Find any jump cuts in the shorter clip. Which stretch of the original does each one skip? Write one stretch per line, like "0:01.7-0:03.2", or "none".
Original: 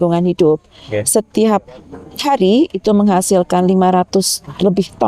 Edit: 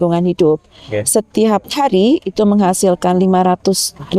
0:01.7-0:02.2